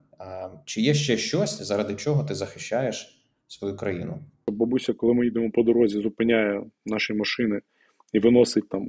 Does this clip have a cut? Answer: yes; 1 cut; at 4.5 s

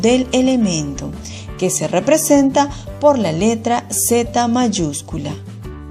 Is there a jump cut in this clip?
no; 0 cuts

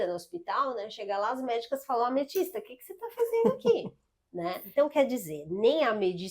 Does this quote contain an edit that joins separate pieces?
yes; 1 cut; at 4.6 s

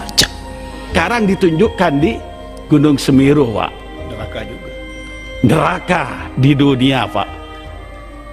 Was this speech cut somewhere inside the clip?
yes; 1 cut; at 0.9 s

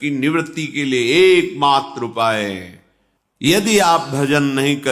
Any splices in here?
yes; 1 cut; at 3.5 s

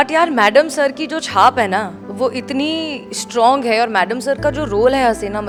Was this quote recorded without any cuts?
yes; 0 cuts

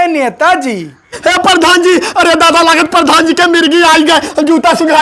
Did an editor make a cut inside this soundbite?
yes; 1 cut; at 1.2 s

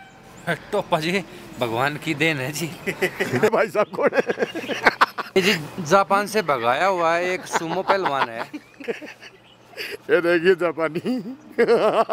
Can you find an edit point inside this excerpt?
yes; 3 cuts; at 3.5 s, 5.4 s, 8.9 s

